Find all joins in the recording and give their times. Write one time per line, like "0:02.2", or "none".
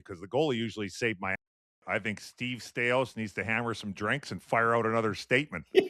0:01.8